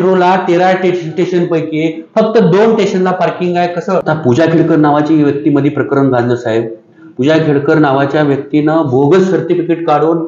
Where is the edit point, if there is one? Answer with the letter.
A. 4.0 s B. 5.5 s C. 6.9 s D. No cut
A